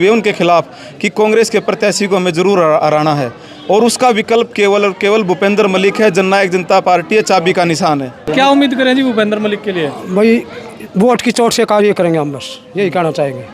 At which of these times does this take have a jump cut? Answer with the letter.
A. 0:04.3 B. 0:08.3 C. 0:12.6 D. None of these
B